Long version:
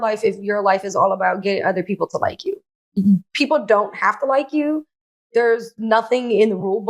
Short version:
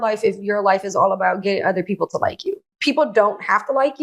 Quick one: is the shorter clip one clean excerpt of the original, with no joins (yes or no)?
no